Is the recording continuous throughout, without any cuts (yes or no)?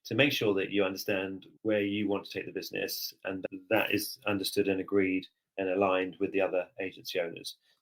no